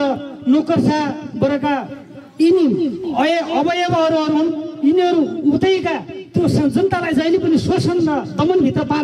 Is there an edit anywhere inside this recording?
no; 0 cuts

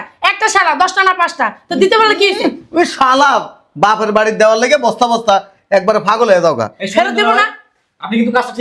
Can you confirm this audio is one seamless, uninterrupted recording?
yes; 0 cuts

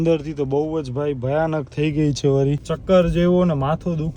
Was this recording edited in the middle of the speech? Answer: yes; 1 cut; at 2.7 s

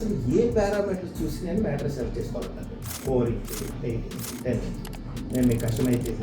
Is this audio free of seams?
no; 1 cut; at 3.0 s

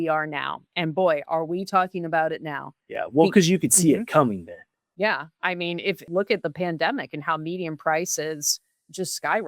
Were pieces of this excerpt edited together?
yes; 1 cut; at 6.0 s

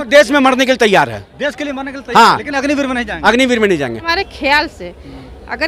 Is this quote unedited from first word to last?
no; 1 cut; at 4.0 s

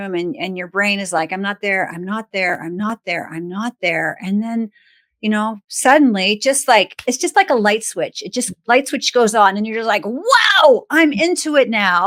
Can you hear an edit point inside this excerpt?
no; 0 cuts

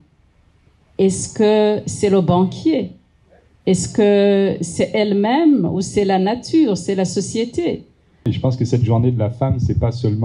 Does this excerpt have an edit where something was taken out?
yes; 1 cut; at 8.3 s

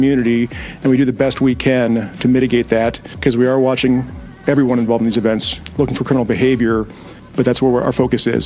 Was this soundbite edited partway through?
yes; 1 cut; at 3.1 s

